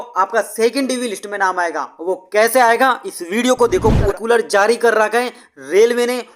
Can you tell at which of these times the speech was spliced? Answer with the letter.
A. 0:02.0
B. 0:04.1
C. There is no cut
B